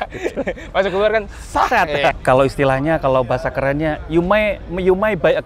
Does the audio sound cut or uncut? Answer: cut